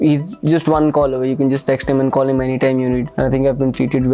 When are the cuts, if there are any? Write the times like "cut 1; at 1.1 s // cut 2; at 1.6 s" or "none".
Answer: cut 1; at 3.1 s